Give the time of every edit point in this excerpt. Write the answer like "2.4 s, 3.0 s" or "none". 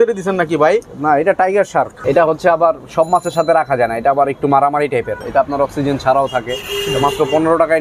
2.0 s, 5.2 s